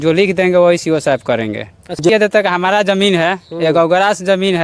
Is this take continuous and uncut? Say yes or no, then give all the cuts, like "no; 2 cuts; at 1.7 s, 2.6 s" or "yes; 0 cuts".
no; 1 cut; at 2.1 s